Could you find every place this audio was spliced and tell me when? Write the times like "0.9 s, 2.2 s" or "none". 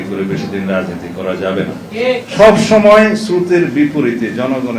2.2 s